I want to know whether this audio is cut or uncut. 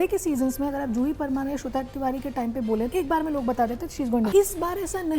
cut